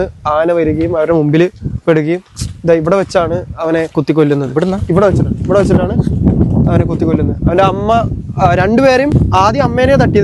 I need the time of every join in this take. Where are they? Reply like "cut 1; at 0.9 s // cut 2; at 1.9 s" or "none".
none